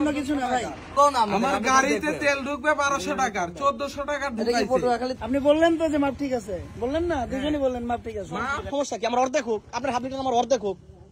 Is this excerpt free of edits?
no; 3 cuts; at 0.9 s, 5.2 s, 8.7 s

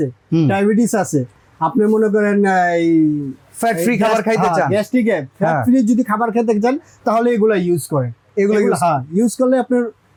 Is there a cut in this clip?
no; 0 cuts

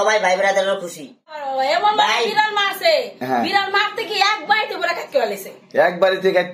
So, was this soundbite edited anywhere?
yes; 1 cut; at 1.4 s

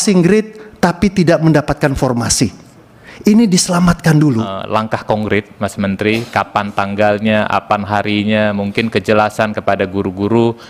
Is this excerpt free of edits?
no; 1 cut; at 4.6 s

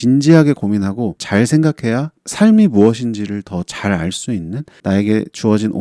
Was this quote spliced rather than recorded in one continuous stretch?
no; 0 cuts

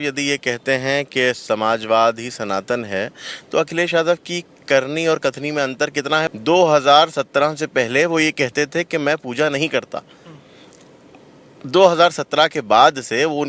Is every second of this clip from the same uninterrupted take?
no; 1 cut; at 6.3 s

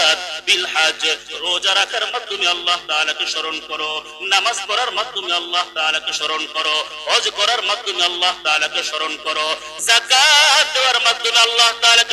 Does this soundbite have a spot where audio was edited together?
no; 0 cuts

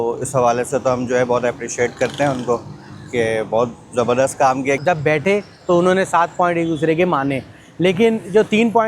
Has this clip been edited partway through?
yes; 1 cut; at 4.8 s

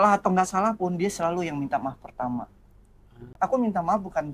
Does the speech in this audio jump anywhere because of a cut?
yes; 1 cut; at 3.3 s

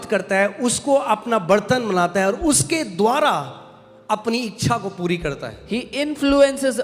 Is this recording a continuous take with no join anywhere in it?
yes; 0 cuts

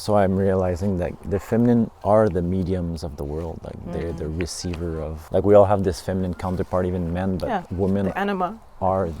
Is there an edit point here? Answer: yes; 3 cuts; at 1.2 s, 2.0 s, 5.2 s

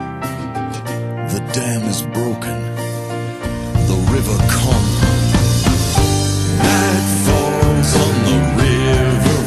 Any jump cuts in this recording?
no; 0 cuts

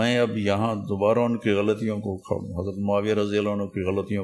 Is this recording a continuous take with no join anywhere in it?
yes; 0 cuts

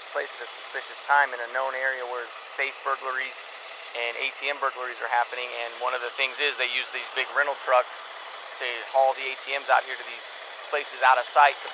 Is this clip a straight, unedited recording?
yes; 0 cuts

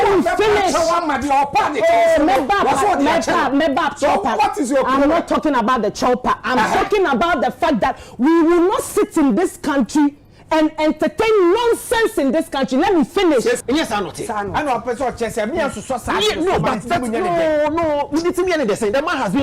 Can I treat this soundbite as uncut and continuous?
no; 1 cut; at 13.6 s

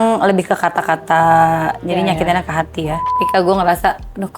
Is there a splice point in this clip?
yes; 1 cut; at 3.2 s

